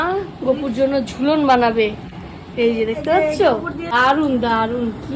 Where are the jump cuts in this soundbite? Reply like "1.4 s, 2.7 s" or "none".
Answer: 3.9 s